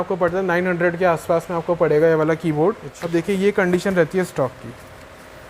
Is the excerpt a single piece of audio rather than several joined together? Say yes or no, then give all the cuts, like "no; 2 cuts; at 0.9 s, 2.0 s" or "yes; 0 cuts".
no; 1 cut; at 3.0 s